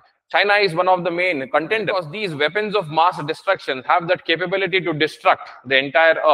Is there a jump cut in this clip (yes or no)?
yes